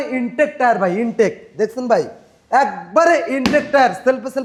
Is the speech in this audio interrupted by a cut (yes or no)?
no